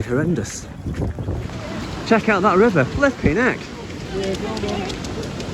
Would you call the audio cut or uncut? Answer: cut